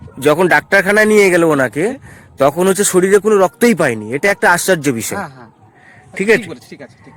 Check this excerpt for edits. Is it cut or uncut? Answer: uncut